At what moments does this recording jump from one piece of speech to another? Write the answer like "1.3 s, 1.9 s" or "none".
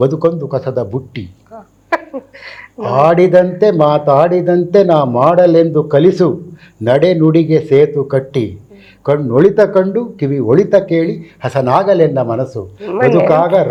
none